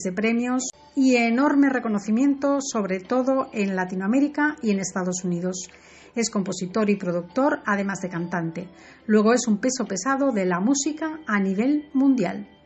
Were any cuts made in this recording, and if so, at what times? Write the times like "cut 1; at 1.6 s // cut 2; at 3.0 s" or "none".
cut 1; at 8.2 s